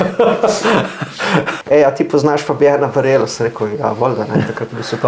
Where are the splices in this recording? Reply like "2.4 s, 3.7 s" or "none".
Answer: 1.5 s